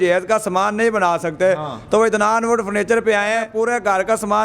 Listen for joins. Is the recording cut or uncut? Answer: cut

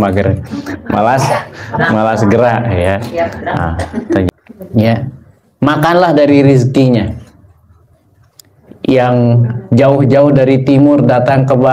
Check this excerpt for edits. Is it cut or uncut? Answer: cut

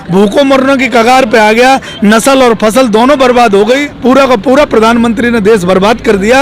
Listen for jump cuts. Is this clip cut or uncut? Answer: cut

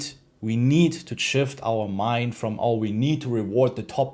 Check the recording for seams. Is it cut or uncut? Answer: uncut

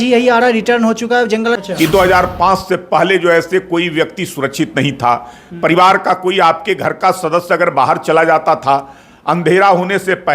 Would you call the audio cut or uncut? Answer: cut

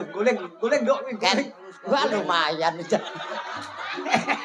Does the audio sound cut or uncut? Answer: cut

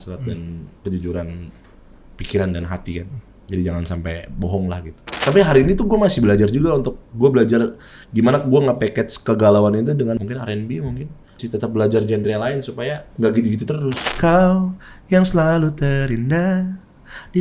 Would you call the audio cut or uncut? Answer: cut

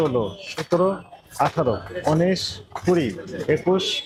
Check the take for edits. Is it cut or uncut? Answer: uncut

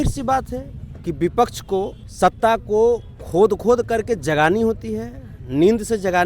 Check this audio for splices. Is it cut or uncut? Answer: cut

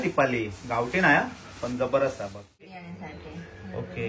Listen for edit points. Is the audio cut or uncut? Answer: cut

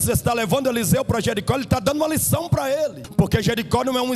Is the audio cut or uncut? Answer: cut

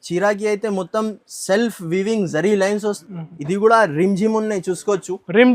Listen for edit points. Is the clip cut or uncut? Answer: cut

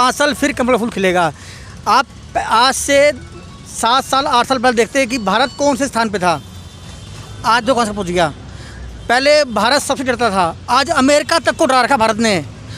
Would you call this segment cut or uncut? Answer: uncut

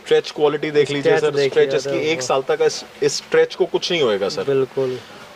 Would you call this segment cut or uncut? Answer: uncut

